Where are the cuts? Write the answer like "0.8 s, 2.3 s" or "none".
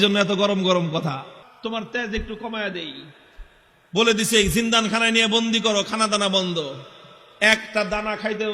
1.4 s